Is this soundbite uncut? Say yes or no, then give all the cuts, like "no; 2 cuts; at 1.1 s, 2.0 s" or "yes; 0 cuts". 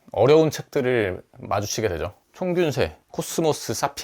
no; 1 cut; at 2.2 s